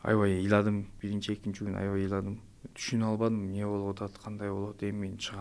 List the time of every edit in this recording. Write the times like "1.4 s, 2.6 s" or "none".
0.9 s